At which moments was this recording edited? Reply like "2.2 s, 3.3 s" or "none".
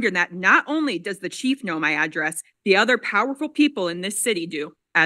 none